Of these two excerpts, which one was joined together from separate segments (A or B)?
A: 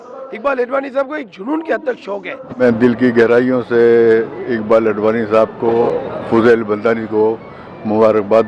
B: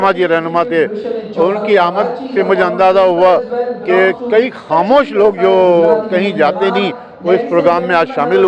A